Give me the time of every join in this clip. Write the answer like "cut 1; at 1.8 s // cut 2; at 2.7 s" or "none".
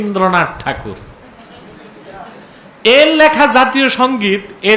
none

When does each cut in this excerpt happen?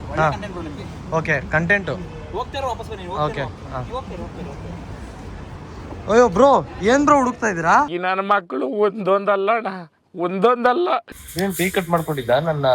cut 1; at 11.2 s

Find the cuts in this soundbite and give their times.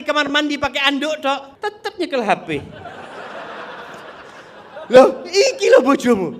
cut 1; at 1.5 s

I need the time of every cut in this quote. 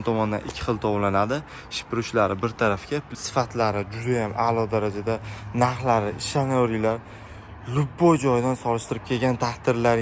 cut 1; at 3.2 s

